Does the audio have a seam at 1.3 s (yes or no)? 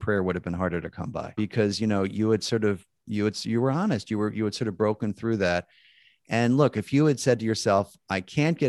yes